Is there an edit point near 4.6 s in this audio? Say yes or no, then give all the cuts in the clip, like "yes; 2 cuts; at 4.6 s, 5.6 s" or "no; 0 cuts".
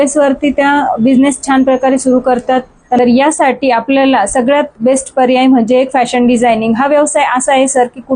no; 1 cut; at 3.0 s